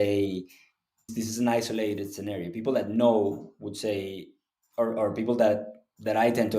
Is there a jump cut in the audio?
yes; 1 cut; at 1.1 s

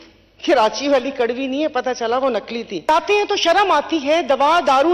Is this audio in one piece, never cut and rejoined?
no; 1 cut; at 2.9 s

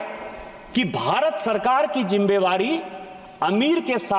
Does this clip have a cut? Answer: no; 0 cuts

